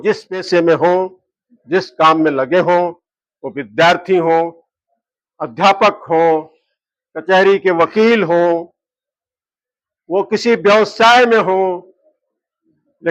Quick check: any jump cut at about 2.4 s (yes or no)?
no